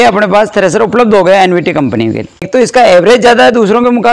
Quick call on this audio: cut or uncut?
cut